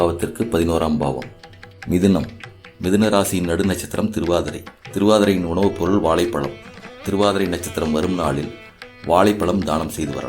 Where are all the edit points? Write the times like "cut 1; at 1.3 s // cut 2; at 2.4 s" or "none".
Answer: cut 1; at 1.7 s